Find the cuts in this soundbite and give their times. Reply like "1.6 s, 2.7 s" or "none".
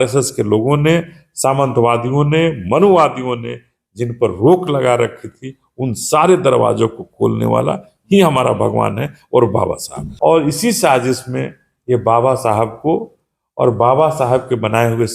10.0 s